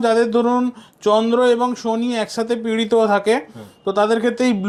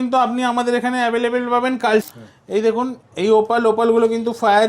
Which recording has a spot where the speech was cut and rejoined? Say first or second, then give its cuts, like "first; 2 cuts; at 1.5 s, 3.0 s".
second; 1 cut; at 2.0 s